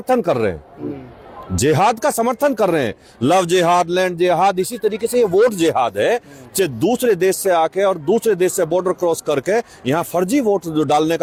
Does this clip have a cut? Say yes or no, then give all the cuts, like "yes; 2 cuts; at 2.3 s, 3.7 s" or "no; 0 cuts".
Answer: no; 0 cuts